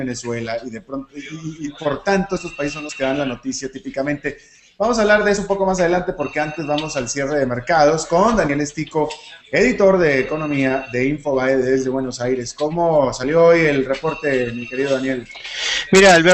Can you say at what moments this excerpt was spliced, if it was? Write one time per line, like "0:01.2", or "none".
0:07.1